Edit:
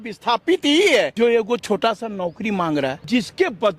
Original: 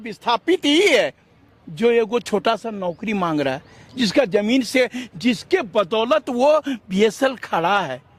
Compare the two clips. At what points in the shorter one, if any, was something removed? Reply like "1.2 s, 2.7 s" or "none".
1.1 s, 3.0 s

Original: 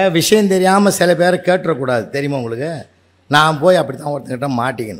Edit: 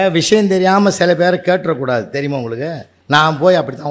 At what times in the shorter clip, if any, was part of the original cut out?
2.9 s

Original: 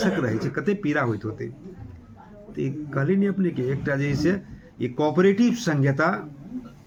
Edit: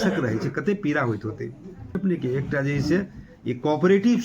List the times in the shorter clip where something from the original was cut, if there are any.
1.9 s

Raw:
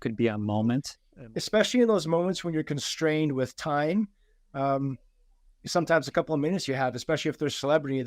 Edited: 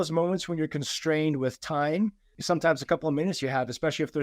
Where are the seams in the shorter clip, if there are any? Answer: 2.3 s

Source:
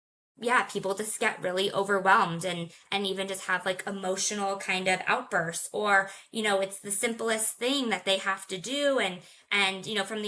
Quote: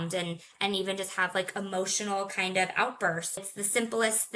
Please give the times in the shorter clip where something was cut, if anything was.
3.4 s

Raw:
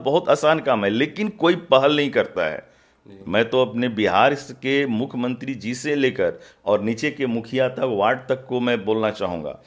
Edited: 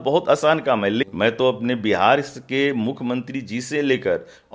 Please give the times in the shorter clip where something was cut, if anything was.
1.1 s

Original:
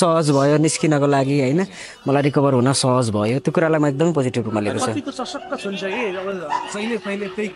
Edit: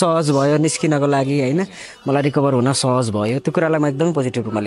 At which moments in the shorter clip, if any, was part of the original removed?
none

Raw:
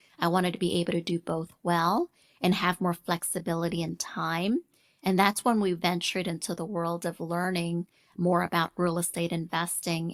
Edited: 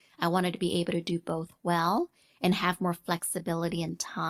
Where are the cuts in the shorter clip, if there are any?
none

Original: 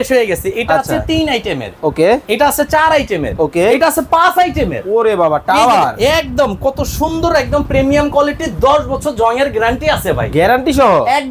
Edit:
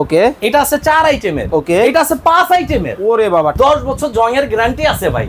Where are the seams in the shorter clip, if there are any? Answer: 3.5 s

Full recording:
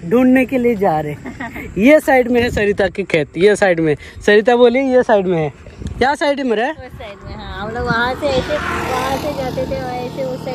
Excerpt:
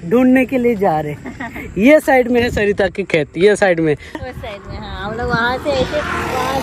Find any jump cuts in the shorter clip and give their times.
4.2 s

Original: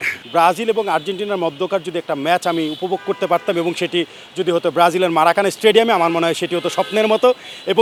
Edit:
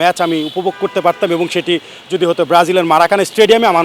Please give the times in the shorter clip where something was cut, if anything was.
none

